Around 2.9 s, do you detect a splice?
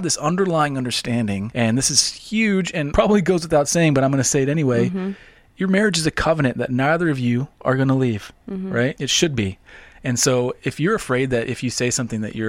yes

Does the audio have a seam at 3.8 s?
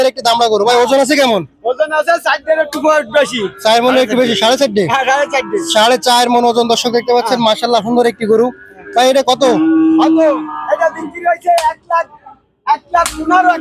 no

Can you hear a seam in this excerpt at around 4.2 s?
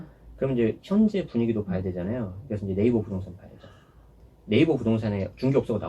yes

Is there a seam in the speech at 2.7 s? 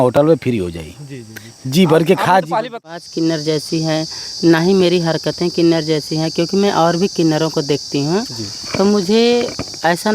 yes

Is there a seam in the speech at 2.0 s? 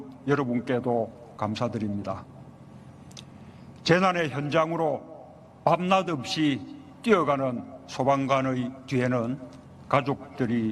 yes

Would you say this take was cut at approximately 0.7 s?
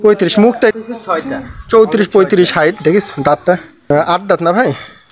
yes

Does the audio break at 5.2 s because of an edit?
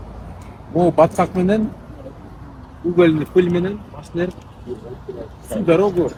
no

